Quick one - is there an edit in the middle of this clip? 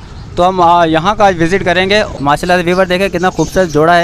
yes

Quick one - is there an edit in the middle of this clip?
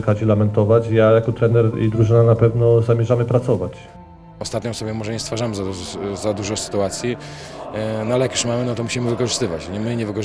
yes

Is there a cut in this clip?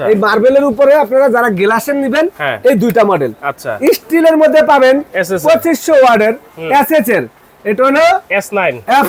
no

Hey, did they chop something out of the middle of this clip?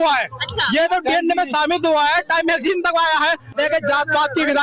yes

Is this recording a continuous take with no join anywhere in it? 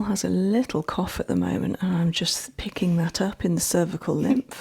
yes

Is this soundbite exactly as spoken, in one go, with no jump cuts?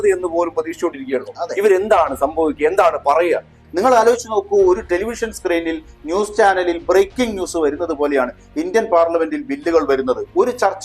no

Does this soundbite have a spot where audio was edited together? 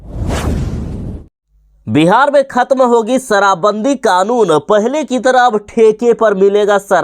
yes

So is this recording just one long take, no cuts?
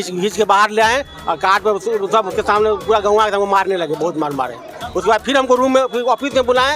yes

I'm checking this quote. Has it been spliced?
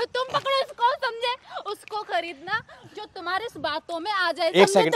no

